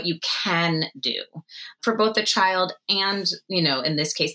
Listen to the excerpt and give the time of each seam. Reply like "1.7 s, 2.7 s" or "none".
1.8 s